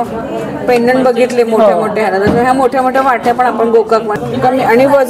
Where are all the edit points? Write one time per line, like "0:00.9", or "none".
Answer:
0:04.1